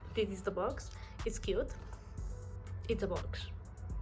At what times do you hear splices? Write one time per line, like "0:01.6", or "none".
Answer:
none